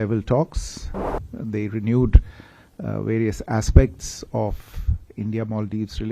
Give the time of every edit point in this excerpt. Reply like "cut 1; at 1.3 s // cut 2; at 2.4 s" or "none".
cut 1; at 1.3 s